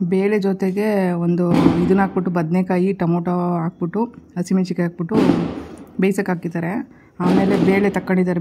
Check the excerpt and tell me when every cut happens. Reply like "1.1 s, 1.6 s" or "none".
none